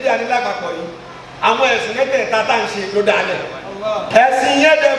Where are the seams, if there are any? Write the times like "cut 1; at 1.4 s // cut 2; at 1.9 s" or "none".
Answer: cut 1; at 4.1 s

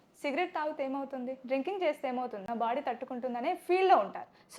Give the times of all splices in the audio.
cut 1; at 2.4 s

